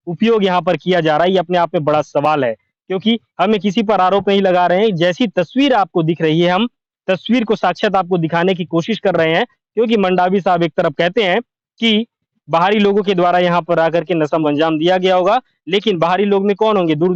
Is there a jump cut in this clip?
no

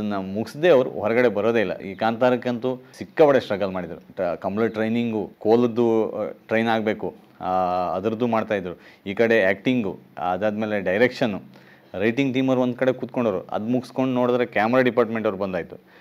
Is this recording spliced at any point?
yes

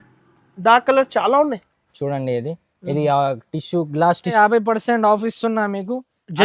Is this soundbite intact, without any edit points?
no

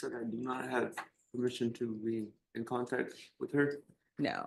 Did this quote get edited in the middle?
no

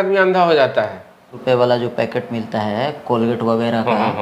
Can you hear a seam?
yes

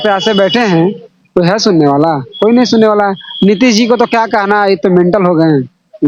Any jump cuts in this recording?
no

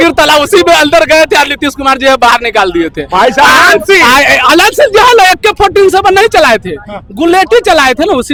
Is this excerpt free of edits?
yes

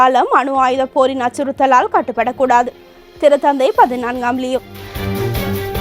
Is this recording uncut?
yes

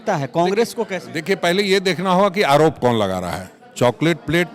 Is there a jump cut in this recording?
no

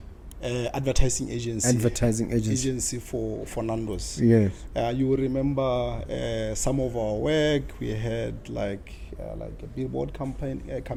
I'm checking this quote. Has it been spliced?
no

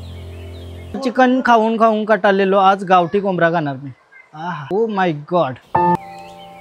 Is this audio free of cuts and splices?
no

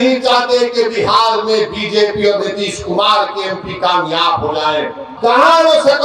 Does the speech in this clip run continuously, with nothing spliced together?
no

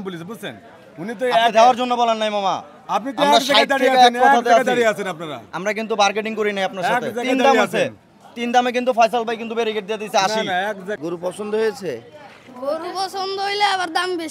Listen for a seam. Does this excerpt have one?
yes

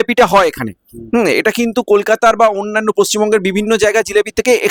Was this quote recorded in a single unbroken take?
yes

